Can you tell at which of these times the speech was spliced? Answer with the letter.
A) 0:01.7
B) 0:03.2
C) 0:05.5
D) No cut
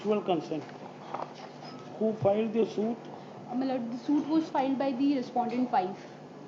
A